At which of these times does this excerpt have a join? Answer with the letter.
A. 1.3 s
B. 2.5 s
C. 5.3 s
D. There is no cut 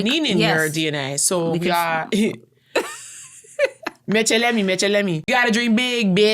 C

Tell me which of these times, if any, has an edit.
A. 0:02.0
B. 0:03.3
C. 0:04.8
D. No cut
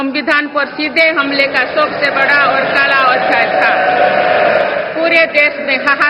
C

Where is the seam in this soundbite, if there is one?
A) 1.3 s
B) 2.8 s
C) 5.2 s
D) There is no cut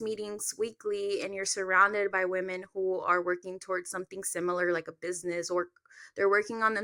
D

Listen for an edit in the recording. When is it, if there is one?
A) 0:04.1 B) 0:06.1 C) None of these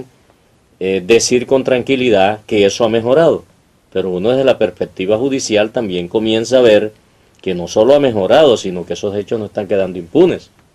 B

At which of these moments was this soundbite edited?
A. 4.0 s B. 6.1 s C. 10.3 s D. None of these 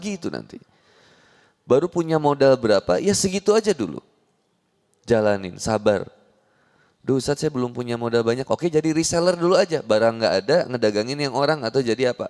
D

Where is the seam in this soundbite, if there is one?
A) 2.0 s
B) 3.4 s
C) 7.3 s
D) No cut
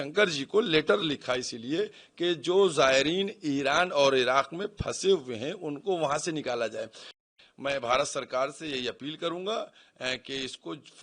C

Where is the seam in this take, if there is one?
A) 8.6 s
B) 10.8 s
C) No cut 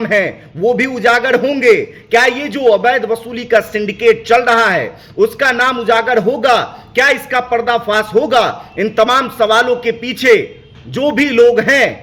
C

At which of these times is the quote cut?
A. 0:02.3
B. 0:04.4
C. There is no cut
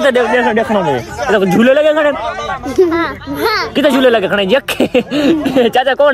C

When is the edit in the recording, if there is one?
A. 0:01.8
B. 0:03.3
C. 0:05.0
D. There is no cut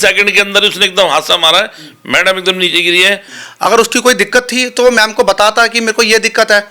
B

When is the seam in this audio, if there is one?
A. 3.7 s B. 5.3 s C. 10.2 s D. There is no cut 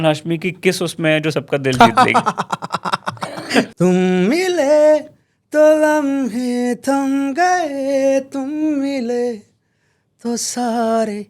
A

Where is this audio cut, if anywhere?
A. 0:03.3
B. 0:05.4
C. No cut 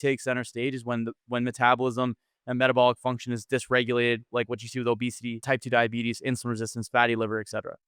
B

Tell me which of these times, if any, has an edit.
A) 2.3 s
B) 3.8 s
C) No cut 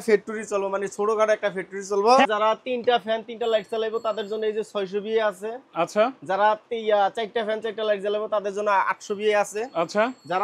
A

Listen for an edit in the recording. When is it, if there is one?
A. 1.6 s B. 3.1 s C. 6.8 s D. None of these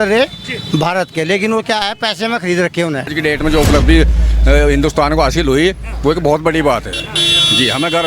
B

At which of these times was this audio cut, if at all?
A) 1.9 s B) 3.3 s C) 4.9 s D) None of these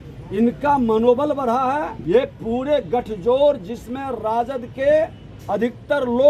A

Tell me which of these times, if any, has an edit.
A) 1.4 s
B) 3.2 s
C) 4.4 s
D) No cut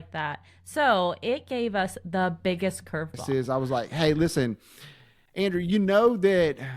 B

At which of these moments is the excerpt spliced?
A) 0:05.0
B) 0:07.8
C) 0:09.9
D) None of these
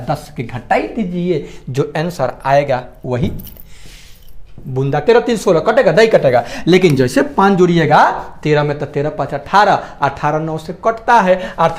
A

